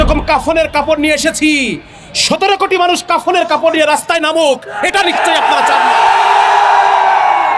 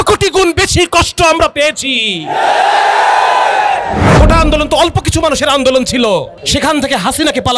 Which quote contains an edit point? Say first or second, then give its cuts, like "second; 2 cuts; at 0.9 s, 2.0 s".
second; 2 cuts; at 4.0 s, 6.4 s